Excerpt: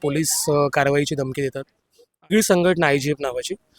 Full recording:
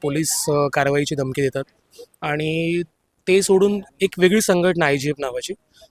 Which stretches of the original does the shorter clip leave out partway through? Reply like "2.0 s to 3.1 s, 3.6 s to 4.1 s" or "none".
2.3 s to 4.3 s